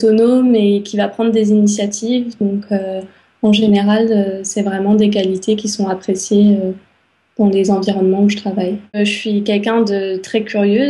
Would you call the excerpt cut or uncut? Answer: uncut